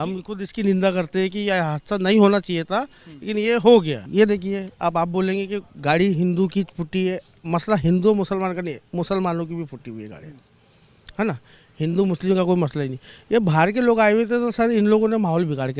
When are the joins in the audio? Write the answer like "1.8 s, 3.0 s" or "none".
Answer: 4.1 s